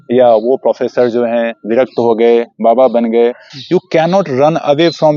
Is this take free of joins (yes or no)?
no